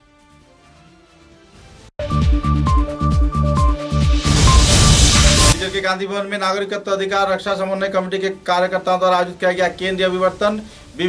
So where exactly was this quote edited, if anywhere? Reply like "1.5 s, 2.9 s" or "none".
none